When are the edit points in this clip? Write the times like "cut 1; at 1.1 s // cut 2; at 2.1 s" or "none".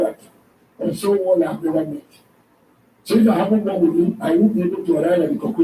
none